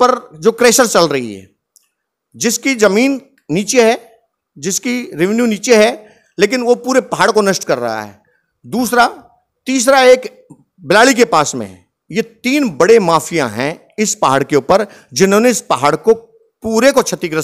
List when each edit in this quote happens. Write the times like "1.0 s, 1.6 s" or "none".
none

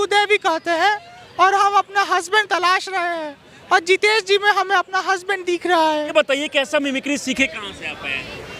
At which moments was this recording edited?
6.4 s

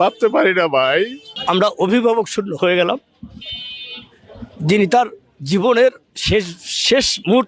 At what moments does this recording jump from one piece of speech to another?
1.3 s

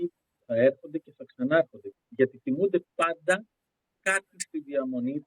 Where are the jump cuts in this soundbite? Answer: 1.9 s

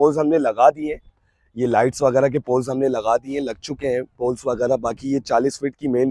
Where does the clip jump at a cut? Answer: none

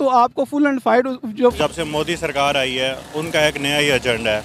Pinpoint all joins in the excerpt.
1.5 s

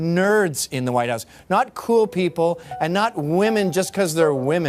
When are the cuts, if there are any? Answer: 2.3 s

